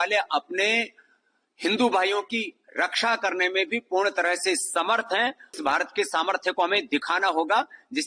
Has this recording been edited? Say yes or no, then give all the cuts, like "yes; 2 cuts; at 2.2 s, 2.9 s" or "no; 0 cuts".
yes; 1 cut; at 5.6 s